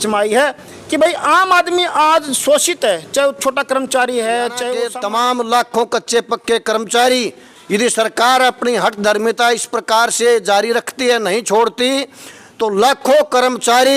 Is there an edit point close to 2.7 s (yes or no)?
no